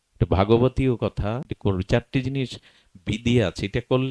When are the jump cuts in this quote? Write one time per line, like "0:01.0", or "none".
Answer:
0:01.4